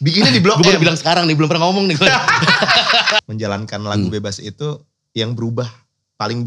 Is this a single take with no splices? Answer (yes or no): no